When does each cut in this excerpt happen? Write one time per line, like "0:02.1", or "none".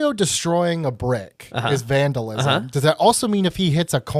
none